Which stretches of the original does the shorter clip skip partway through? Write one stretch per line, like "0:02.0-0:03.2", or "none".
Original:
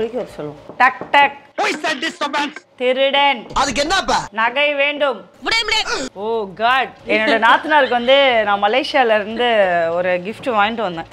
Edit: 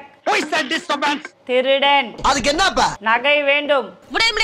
none